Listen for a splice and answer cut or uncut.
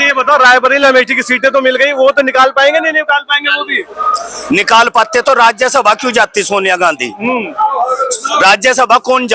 uncut